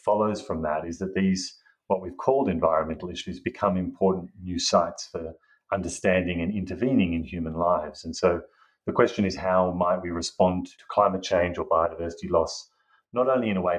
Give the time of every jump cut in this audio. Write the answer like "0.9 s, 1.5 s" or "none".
10.7 s